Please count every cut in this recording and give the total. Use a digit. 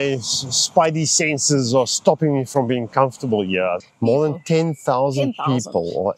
1